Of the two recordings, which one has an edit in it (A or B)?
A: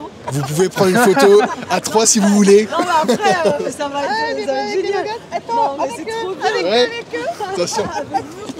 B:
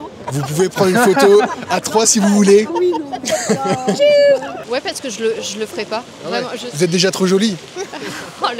B